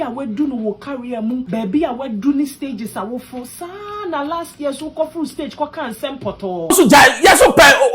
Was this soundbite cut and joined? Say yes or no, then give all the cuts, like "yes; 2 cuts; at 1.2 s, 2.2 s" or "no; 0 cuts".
yes; 2 cuts; at 1.5 s, 6.7 s